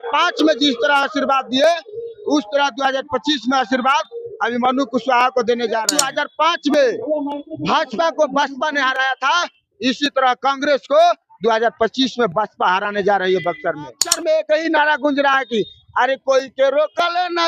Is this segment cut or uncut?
cut